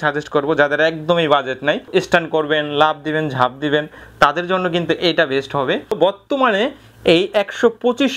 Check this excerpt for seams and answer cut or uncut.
cut